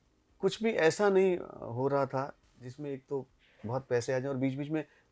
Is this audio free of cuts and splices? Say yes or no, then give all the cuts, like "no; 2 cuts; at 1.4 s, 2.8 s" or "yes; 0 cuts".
yes; 0 cuts